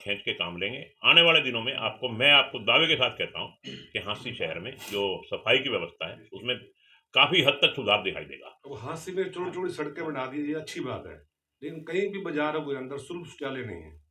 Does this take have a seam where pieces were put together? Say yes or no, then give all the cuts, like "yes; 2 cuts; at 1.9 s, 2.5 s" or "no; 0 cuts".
no; 0 cuts